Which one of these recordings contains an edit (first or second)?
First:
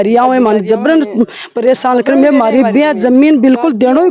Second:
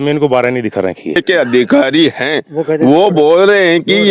second